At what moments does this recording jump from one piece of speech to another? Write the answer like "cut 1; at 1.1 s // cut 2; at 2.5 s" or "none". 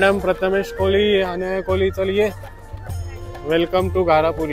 none